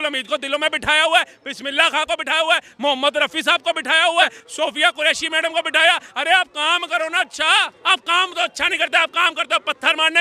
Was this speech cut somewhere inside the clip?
yes; 2 cuts; at 4.4 s, 7.7 s

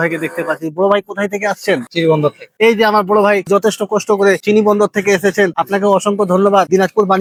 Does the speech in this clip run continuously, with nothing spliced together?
yes; 0 cuts

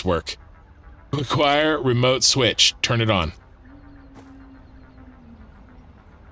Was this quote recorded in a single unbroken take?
yes; 0 cuts

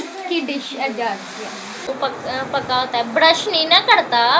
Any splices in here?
yes; 1 cut; at 1.9 s

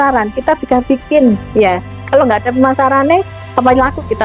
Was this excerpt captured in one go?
yes; 0 cuts

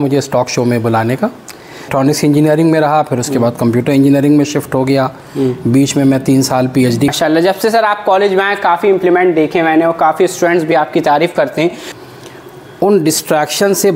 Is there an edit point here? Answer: yes; 3 cuts; at 1.9 s, 7.1 s, 11.9 s

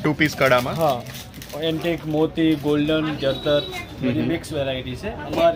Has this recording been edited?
no; 0 cuts

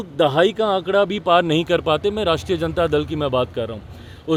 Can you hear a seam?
no; 0 cuts

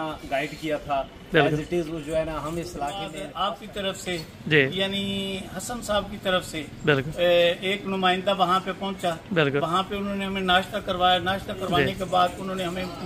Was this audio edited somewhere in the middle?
yes; 1 cut; at 3.2 s

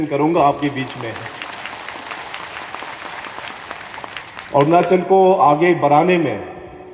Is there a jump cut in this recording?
no; 0 cuts

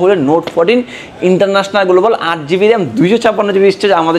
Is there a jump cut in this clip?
no; 0 cuts

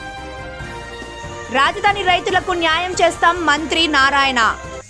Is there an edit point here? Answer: no; 0 cuts

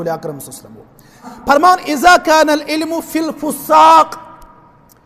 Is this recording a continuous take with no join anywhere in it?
no; 1 cut; at 1.3 s

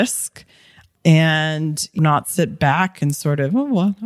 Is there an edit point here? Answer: yes; 1 cut; at 1.9 s

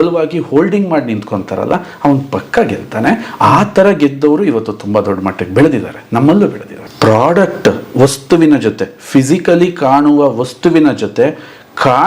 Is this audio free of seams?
no; 1 cut; at 6.7 s

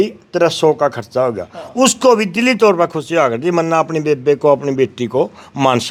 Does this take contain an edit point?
no; 0 cuts

